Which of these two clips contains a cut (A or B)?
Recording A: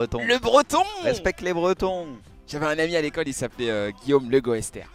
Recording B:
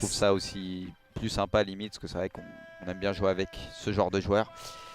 B